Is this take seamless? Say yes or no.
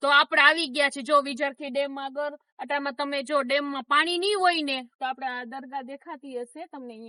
yes